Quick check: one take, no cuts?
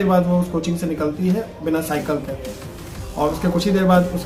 yes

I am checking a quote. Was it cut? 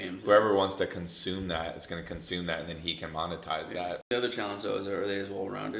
yes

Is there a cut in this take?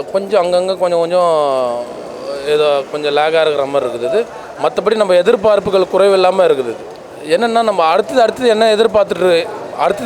no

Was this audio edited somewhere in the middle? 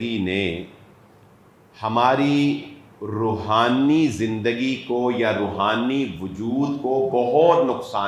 no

